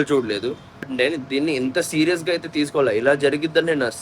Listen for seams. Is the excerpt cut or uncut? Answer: cut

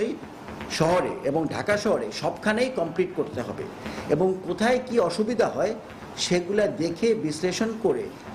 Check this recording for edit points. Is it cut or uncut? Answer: uncut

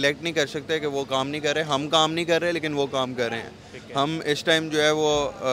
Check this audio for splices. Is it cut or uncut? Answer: uncut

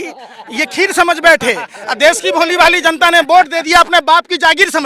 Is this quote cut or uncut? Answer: uncut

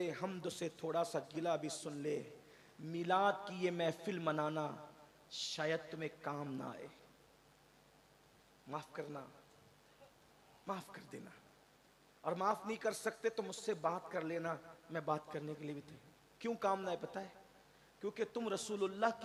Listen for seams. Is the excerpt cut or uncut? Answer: uncut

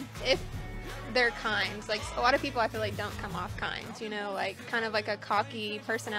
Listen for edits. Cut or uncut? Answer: uncut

